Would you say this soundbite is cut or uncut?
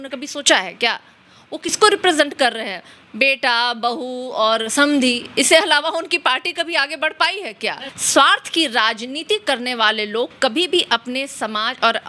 cut